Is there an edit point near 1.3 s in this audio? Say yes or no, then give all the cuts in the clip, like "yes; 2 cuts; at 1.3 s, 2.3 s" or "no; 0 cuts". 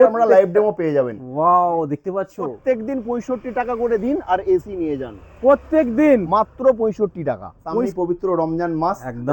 no; 2 cuts; at 2.6 s, 7.9 s